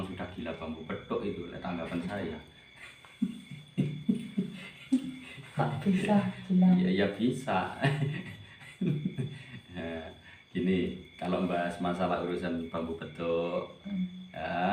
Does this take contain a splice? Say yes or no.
no